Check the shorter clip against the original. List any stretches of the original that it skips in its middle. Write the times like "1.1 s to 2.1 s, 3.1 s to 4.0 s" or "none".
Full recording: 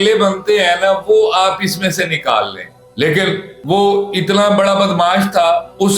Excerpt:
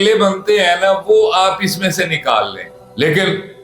none

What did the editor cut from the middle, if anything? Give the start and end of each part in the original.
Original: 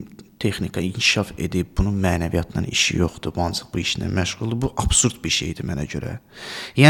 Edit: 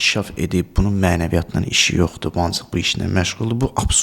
none

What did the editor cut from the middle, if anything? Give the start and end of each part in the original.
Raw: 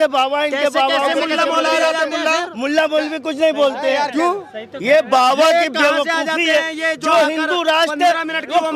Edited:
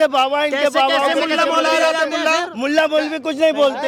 none

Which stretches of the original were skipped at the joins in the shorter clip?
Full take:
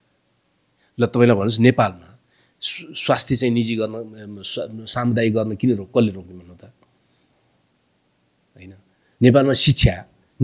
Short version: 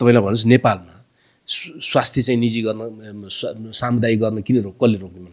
none

